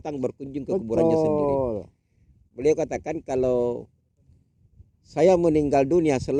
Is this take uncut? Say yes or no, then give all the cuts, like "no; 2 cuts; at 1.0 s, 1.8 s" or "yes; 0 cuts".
yes; 0 cuts